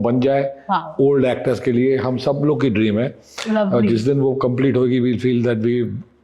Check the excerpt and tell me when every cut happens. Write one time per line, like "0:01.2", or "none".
none

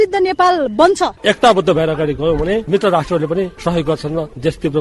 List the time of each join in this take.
0:01.2
0:02.7

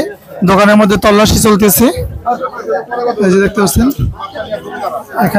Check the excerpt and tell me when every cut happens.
none

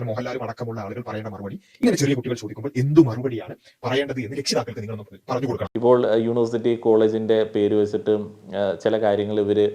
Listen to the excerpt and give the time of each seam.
0:05.6

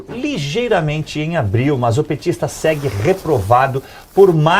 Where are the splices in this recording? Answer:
0:01.2

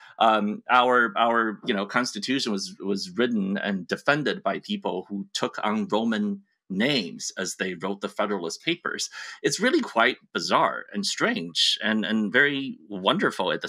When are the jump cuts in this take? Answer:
none

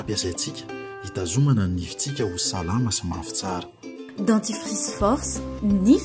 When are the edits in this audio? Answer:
none

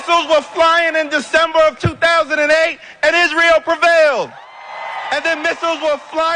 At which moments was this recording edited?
0:01.9

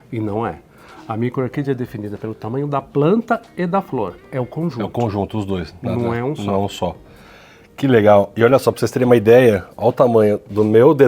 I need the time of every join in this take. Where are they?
none

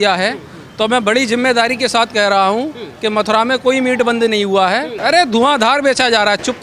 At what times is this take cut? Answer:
0:04.9

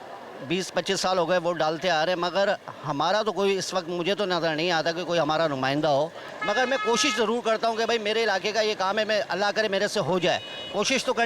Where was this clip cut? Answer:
0:06.3

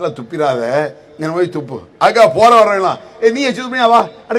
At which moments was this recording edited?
none

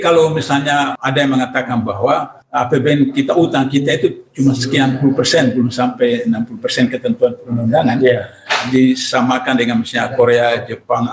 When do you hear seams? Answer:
0:01.0
0:02.4

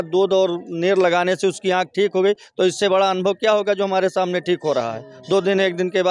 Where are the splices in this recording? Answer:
none

